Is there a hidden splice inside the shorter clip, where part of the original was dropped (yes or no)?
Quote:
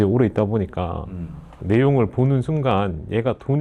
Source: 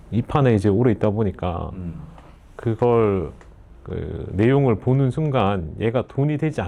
yes